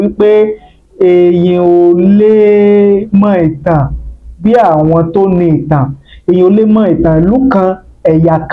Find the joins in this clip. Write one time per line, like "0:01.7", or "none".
none